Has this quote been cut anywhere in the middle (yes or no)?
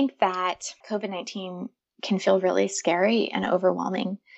no